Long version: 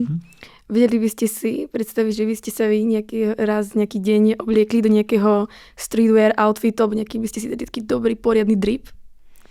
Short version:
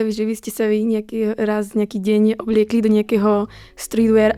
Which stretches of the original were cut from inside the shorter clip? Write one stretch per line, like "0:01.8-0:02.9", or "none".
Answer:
none

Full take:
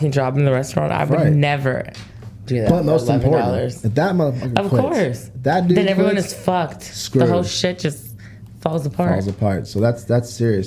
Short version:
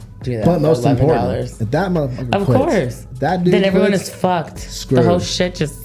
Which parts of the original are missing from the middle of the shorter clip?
none

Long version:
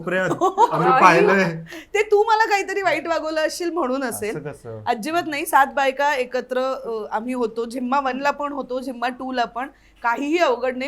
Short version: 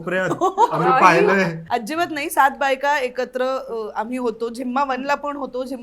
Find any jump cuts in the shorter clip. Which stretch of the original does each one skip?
0:01.6-0:04.8

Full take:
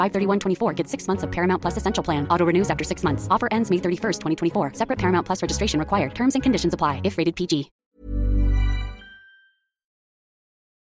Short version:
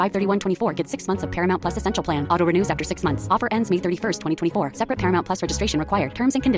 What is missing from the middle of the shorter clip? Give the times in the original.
none

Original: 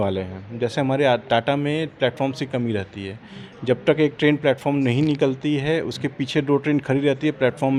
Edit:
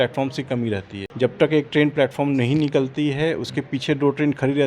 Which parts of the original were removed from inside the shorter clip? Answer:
0:03.0-0:03.4

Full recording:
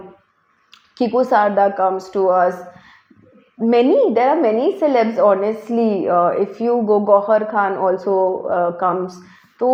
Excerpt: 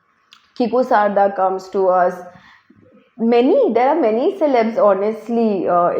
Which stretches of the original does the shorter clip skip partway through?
none

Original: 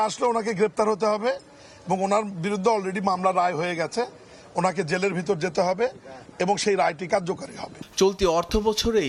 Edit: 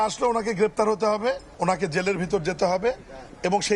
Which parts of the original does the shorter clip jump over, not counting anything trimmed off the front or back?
0:01.5-0:04.4

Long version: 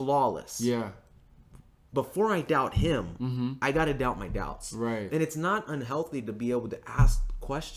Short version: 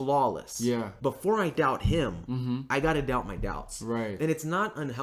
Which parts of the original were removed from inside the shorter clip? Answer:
0:00.9-0:01.8

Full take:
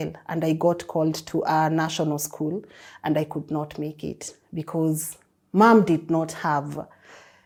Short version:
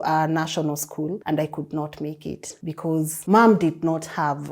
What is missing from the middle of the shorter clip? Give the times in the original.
0:02.6-0:03.0
0:04.6-0:05.1

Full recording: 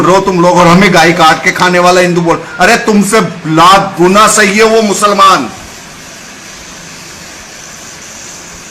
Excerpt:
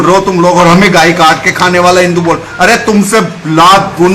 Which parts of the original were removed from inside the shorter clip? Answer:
none

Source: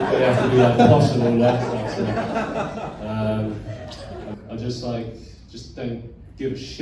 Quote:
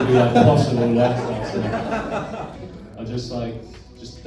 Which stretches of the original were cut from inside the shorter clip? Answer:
0:03.0-0:04.1

